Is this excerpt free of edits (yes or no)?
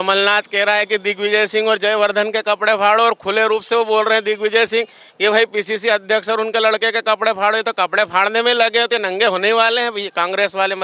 yes